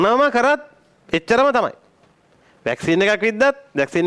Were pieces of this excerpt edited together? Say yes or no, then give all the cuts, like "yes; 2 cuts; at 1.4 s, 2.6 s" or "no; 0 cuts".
no; 0 cuts